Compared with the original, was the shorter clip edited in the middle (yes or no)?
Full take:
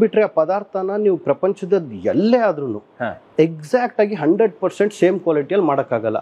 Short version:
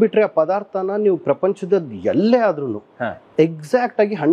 no